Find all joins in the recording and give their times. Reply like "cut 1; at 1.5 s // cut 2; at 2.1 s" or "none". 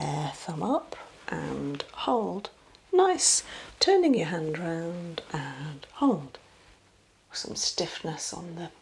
cut 1; at 7.3 s